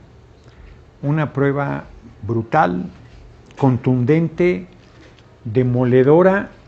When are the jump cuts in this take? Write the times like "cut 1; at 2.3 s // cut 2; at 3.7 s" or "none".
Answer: none